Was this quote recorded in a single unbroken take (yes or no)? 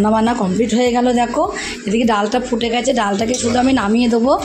yes